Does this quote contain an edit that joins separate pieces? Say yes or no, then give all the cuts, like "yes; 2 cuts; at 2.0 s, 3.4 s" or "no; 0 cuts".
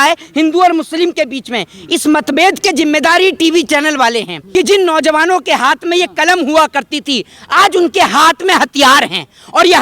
yes; 1 cut; at 4.3 s